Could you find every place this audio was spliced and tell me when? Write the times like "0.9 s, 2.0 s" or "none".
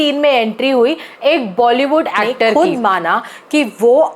2.5 s